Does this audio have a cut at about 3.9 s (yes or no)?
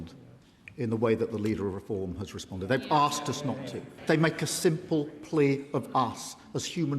yes